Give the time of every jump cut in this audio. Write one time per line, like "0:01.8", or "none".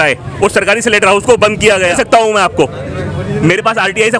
0:01.9